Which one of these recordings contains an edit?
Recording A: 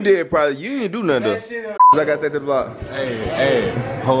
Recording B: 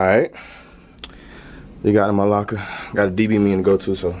A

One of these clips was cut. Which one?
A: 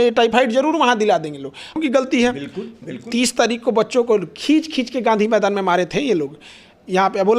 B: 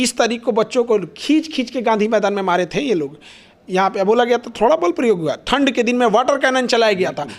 A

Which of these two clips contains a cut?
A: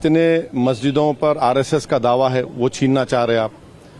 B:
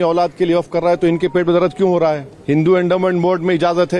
B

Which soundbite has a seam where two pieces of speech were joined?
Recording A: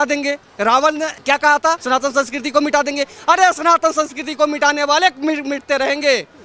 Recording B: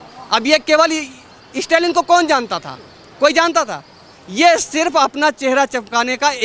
A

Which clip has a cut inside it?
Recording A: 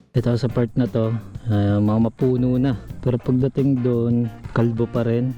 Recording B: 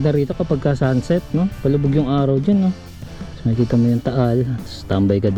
A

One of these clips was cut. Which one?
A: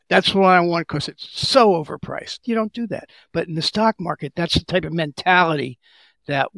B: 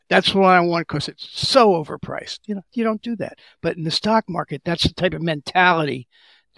A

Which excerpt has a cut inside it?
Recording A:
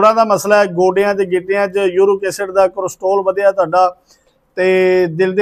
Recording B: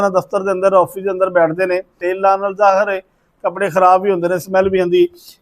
B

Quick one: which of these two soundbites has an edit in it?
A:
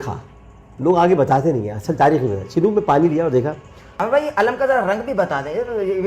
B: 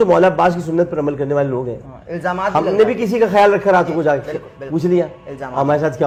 A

